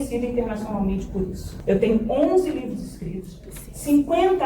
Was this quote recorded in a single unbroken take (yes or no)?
no